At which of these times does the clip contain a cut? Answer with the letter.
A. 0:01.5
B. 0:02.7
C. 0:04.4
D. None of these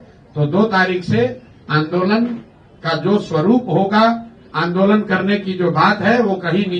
D